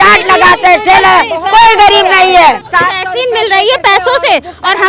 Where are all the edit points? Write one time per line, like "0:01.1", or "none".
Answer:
0:02.7